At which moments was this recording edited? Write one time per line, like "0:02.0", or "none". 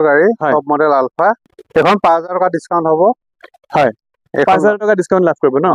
0:01.5